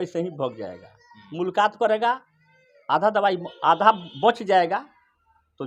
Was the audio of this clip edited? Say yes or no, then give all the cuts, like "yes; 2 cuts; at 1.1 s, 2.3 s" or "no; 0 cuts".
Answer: no; 0 cuts